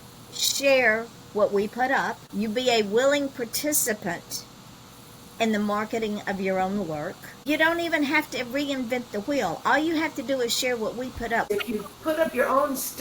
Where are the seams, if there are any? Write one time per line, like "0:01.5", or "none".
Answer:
0:02.2
0:07.4
0:11.5

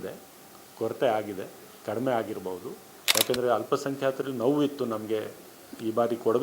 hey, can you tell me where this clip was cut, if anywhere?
0:03.0

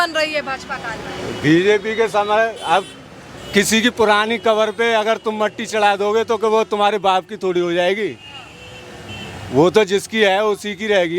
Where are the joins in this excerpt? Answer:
none

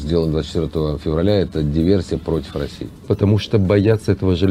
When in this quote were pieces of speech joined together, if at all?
0:03.1

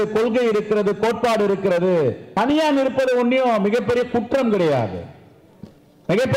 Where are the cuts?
0:02.2

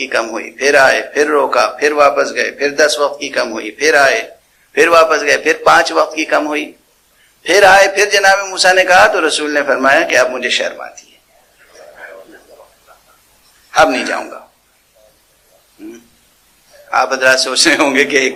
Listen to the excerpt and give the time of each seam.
none

